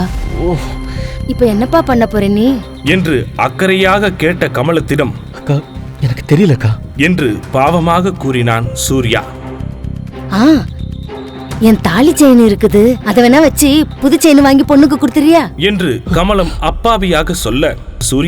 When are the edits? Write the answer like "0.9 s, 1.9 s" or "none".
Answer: none